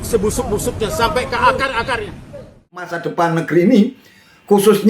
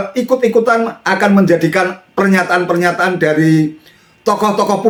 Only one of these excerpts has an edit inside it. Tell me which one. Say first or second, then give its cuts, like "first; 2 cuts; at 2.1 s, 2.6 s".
first; 1 cut; at 3.0 s